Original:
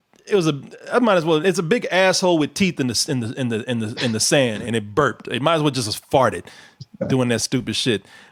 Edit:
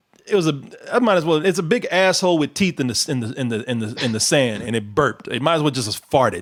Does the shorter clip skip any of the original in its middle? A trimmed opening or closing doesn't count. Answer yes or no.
no